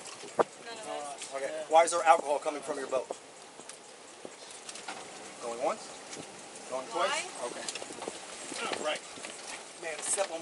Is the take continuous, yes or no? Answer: no